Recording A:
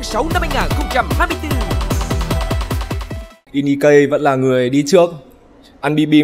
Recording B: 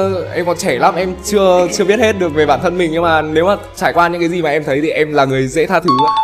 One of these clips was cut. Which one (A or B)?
A